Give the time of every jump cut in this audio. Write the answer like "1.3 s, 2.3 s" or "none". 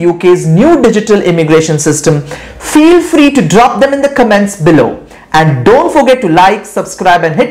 none